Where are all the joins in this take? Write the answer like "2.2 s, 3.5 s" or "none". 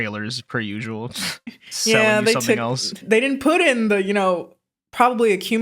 3.0 s